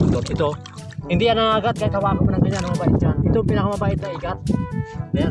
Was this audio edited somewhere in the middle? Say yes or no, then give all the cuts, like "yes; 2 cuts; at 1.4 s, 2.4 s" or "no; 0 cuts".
no; 0 cuts